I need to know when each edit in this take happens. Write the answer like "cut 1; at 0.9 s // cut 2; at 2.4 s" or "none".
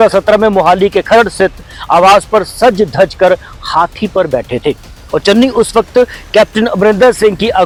none

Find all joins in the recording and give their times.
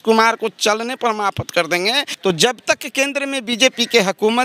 cut 1; at 2.1 s

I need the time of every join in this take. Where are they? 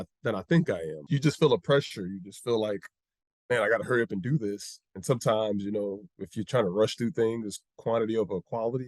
cut 1; at 1.0 s

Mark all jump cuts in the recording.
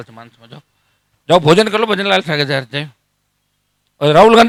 none

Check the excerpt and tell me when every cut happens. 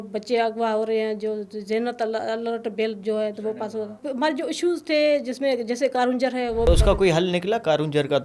cut 1; at 4.0 s // cut 2; at 6.7 s

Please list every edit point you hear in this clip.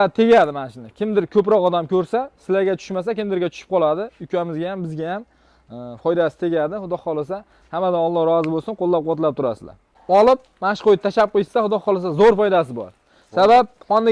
cut 1; at 9.9 s

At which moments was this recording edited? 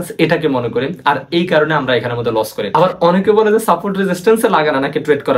cut 1; at 2.7 s

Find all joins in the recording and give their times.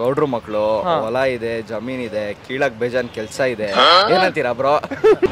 cut 1; at 3.9 s

